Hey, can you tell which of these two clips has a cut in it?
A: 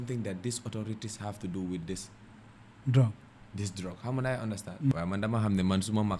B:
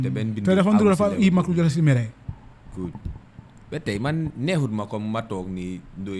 A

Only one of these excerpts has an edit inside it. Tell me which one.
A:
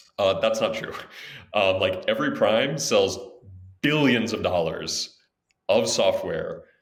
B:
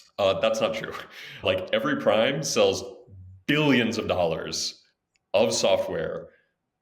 B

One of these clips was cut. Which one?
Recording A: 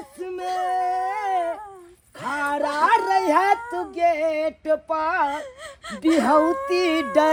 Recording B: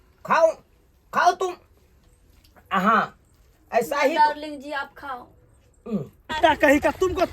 B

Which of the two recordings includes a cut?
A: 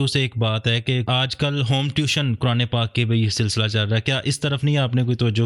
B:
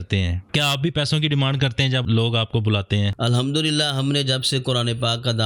B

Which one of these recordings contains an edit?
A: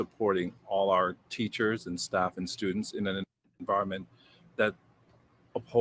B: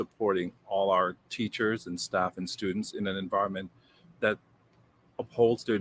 B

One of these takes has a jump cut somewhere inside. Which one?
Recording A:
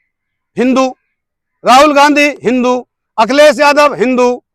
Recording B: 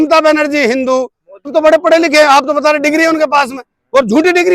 B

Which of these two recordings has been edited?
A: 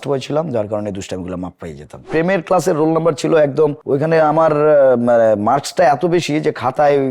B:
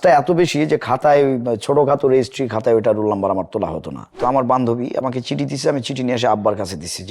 B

